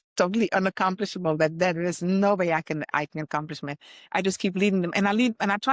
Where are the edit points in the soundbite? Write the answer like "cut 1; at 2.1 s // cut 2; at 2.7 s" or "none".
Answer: none